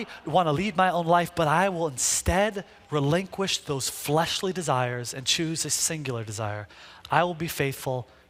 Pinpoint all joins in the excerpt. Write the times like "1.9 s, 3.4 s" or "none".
none